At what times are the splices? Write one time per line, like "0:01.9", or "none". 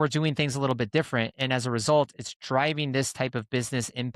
none